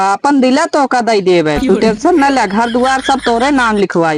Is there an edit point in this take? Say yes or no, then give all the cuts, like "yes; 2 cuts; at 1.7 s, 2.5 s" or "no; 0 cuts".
no; 0 cuts